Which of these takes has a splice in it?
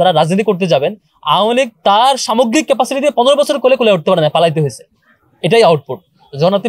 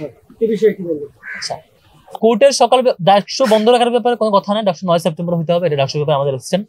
second; 1 cut; at 2.0 s

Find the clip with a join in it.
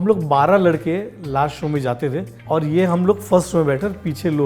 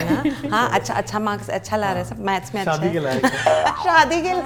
first; 1 cut; at 2.3 s

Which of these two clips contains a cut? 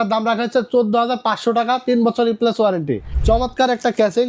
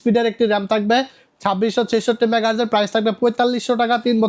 first; 1 cut; at 3.1 s

